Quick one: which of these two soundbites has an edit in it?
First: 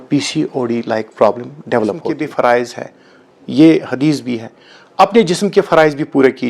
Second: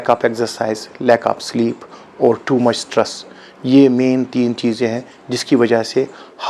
first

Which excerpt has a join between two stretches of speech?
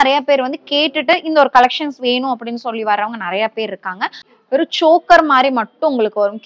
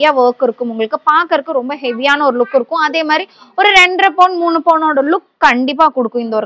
first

